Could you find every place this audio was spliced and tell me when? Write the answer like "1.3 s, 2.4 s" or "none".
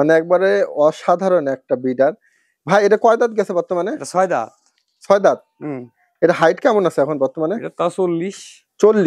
none